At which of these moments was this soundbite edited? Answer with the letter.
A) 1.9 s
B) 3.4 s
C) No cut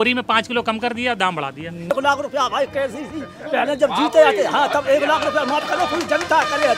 A